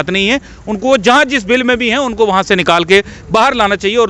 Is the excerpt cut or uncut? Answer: uncut